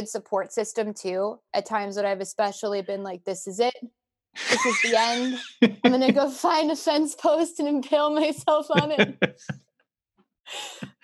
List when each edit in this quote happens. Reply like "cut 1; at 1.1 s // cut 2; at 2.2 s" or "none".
cut 1; at 1.4 s